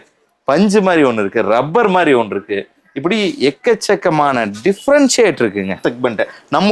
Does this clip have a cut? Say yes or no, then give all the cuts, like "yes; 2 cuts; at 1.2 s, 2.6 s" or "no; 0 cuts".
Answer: yes; 1 cut; at 5.8 s